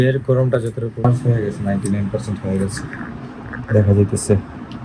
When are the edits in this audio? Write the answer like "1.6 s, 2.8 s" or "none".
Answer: 1.1 s